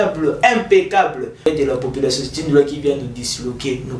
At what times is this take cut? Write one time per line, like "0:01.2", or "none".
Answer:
0:01.5